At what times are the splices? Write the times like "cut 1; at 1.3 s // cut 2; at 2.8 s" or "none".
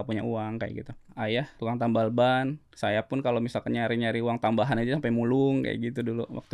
cut 1; at 1.5 s // cut 2; at 2.7 s